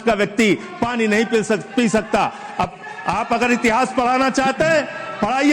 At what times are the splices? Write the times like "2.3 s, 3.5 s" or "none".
none